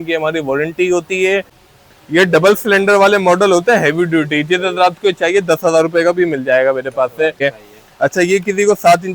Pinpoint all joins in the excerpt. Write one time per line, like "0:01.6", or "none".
0:01.6
0:07.4